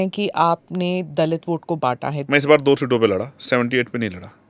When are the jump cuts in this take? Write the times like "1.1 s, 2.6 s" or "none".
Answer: 2.1 s